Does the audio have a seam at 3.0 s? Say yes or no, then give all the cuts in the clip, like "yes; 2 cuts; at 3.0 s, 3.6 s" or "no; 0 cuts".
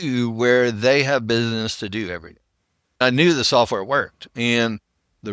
yes; 1 cut; at 3.0 s